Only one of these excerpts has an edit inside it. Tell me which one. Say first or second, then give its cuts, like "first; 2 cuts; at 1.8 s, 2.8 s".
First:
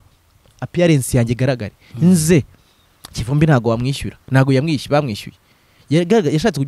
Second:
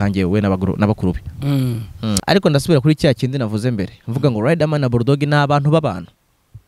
second; 1 cut; at 2.2 s